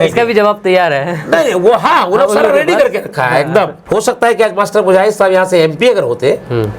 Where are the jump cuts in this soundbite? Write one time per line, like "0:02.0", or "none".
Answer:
0:03.8